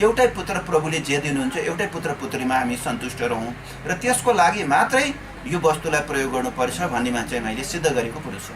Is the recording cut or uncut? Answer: uncut